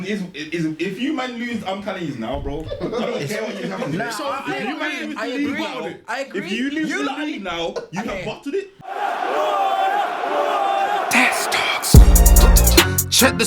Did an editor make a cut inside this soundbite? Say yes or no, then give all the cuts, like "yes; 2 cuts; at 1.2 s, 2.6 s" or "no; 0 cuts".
yes; 1 cut; at 8.8 s